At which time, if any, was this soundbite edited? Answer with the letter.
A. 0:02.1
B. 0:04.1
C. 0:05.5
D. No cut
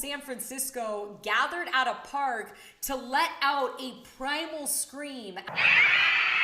C